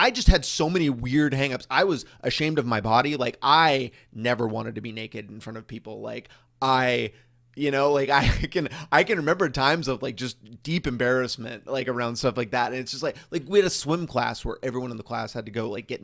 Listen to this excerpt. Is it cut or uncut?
uncut